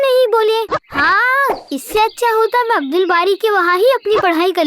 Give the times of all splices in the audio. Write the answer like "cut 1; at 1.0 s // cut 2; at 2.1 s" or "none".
none